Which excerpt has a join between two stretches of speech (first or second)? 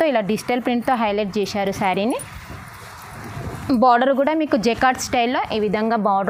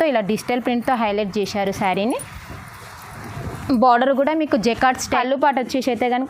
second